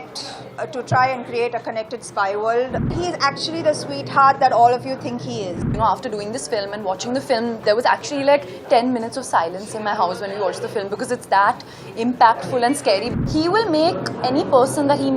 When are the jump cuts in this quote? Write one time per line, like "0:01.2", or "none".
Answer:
0:02.9
0:05.7
0:13.1